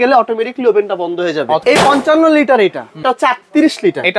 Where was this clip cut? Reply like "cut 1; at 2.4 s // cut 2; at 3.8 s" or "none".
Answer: cut 1; at 1.6 s // cut 2; at 3.0 s